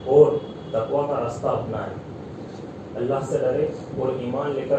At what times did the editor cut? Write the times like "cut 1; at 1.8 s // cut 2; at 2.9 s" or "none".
none